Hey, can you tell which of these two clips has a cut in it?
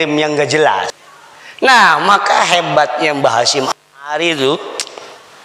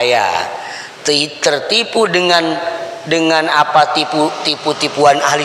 first; 1 cut; at 1.0 s

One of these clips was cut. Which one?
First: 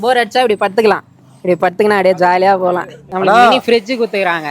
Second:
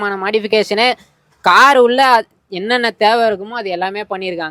first; 1 cut; at 3.0 s

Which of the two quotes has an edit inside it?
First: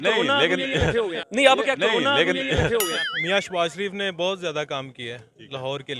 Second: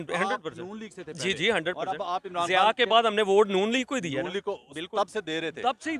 first; 2 cuts; at 1.2 s, 2.9 s

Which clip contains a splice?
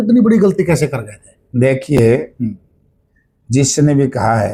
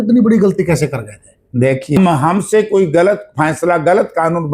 second; 1 cut; at 2.0 s

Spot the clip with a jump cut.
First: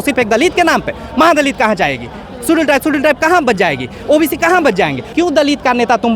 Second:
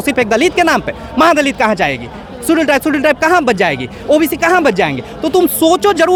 first; 1 cut; at 5.1 s

